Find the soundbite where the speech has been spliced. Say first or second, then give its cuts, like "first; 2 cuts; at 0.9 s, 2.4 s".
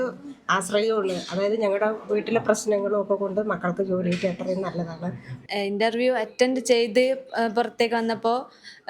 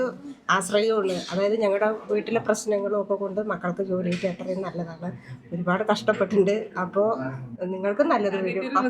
first; 1 cut; at 5.4 s